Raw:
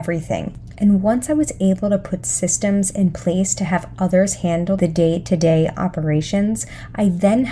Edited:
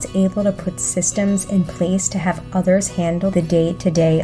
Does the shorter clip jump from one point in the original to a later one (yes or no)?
no